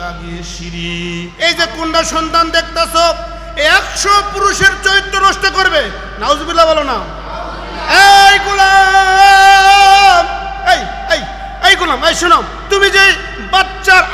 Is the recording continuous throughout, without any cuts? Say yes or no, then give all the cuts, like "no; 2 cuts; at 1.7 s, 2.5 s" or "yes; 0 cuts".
no; 1 cut; at 1.3 s